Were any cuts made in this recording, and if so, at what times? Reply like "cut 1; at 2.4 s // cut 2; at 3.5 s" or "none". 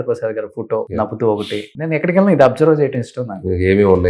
cut 1; at 0.9 s // cut 2; at 1.7 s